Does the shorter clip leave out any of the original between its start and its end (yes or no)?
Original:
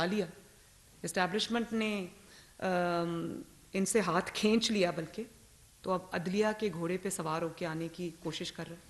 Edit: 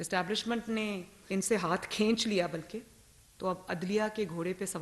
yes